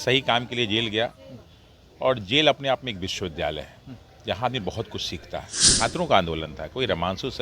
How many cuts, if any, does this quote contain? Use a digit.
1